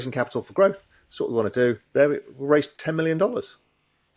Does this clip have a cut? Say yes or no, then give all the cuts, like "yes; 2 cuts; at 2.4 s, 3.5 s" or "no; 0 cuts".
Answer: yes; 1 cut; at 1.8 s